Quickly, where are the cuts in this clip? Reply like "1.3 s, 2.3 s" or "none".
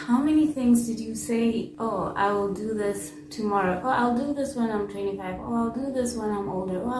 none